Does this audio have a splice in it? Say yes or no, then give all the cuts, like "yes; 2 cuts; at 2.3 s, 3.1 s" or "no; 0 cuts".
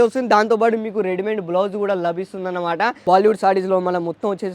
yes; 1 cut; at 3.0 s